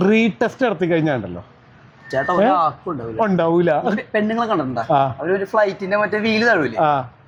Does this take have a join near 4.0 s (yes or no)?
no